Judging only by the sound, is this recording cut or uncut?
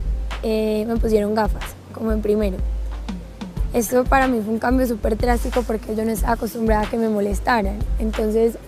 cut